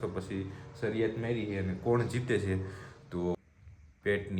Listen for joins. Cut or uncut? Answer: cut